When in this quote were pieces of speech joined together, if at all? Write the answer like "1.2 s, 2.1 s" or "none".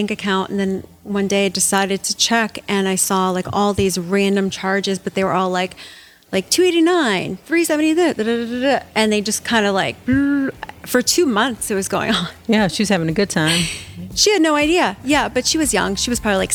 none